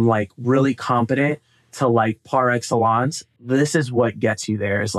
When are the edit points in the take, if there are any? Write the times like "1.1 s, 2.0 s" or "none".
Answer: 3.4 s